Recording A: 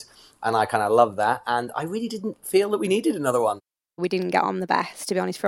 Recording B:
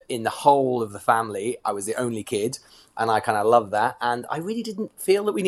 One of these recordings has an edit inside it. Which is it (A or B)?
A